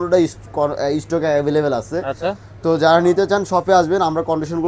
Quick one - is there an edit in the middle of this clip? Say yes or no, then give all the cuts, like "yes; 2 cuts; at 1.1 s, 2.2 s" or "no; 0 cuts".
no; 0 cuts